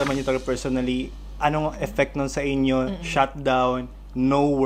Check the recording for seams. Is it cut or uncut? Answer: uncut